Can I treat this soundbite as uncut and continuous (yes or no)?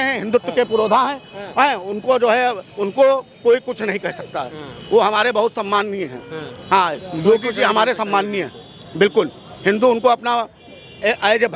yes